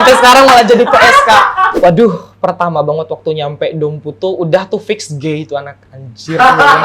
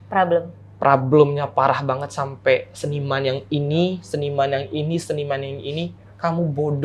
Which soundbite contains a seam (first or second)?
first